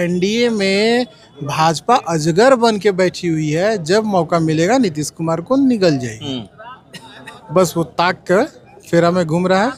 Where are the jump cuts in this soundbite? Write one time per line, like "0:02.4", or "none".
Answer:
none